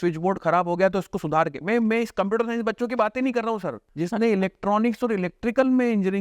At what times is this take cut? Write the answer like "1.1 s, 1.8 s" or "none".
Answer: 3.8 s